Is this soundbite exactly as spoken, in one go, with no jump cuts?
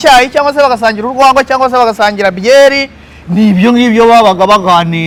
yes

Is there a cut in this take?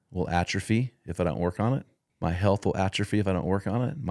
yes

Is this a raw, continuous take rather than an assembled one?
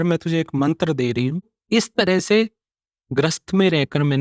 no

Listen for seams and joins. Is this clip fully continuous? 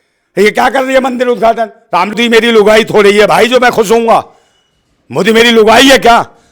no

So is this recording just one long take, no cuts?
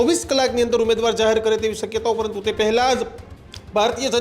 yes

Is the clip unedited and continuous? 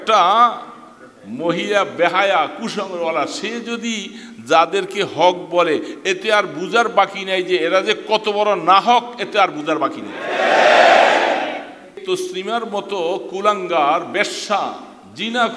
no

